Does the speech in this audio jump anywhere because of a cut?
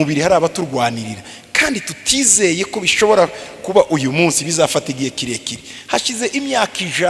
no; 0 cuts

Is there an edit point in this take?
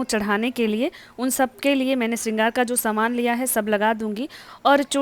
no; 0 cuts

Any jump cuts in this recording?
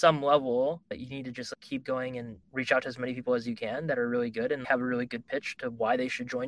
yes; 2 cuts; at 1.4 s, 4.6 s

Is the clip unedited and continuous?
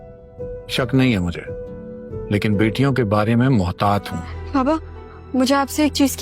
no; 1 cut; at 4.1 s

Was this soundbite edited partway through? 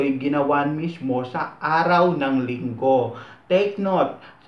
no; 0 cuts

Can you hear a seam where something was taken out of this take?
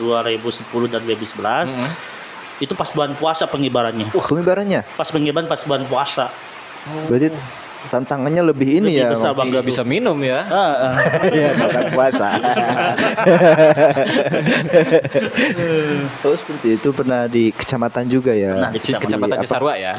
no; 0 cuts

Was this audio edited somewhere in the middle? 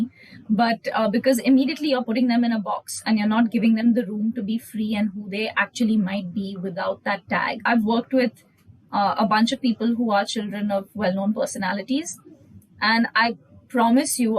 yes; 1 cut; at 7.6 s

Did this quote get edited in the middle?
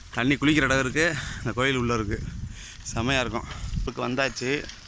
yes; 1 cut; at 3.9 s

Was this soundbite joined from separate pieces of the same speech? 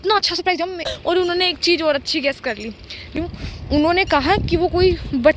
yes; 2 cuts; at 0.9 s, 3.1 s

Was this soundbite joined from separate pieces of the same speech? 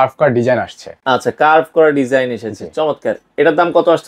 no; 0 cuts

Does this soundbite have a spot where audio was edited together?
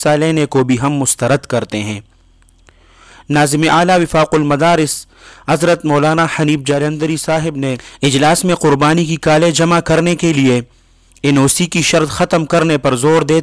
yes; 1 cut; at 7.9 s

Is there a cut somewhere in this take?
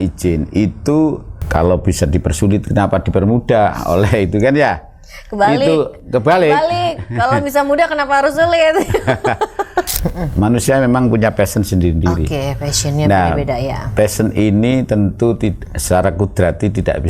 yes; 2 cuts; at 1.3 s, 9.9 s

